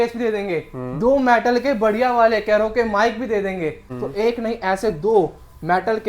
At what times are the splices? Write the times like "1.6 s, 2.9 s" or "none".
3.9 s